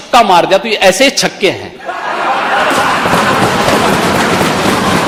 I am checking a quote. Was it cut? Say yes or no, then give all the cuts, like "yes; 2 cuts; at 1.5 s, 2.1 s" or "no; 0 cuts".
no; 0 cuts